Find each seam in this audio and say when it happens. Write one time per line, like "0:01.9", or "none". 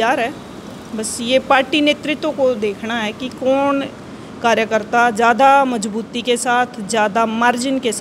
none